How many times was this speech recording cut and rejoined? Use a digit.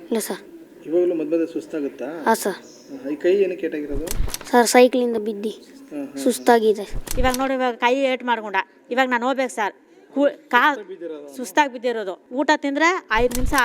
2